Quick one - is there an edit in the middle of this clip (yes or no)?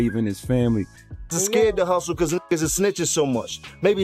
yes